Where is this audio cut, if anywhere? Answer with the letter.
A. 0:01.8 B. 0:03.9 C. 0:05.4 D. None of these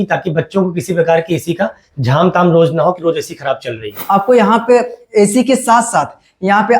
B